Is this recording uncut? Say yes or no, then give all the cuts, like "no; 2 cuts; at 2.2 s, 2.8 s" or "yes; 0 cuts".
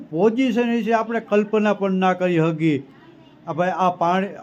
yes; 0 cuts